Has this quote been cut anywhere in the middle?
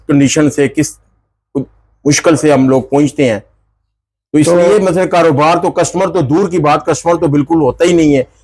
no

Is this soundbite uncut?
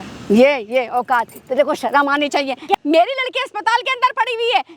no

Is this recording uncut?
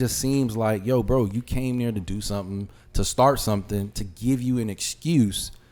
yes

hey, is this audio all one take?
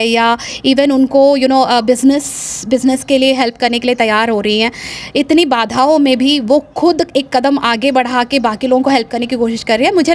yes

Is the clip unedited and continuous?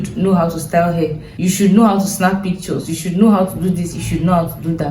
no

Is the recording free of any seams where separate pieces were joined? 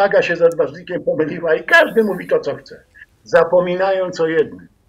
yes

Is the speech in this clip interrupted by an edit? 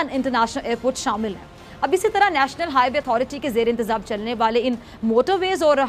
no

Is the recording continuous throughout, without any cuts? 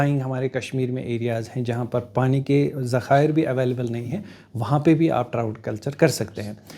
yes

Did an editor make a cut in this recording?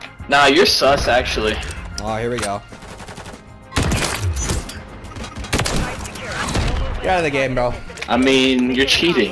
yes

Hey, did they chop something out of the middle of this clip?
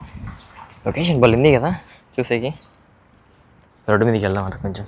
no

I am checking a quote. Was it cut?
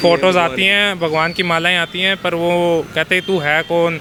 no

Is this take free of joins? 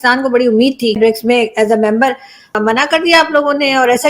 no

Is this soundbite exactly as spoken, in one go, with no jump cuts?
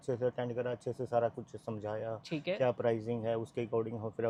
yes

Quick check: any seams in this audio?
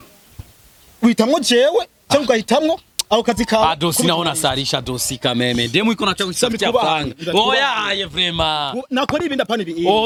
no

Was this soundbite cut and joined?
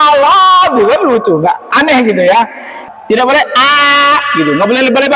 yes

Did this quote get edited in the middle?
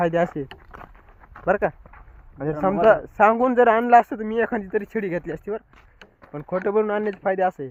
no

